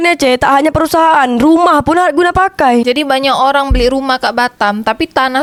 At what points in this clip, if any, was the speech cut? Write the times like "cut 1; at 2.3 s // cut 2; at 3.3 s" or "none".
none